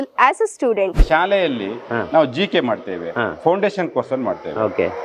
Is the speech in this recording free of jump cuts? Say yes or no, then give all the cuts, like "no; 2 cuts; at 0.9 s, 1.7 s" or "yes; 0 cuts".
no; 1 cut; at 1.1 s